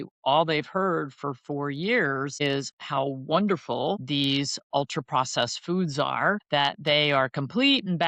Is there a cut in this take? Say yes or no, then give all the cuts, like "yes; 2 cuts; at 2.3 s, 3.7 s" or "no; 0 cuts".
yes; 3 cuts; at 2.4 s, 4.0 s, 6.4 s